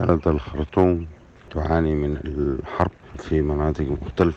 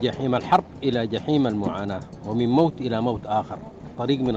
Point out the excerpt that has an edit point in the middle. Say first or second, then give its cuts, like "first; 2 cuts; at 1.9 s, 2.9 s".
first; 2 cuts; at 1.4 s, 3.0 s